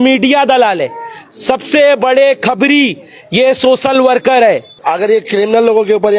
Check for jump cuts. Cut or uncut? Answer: cut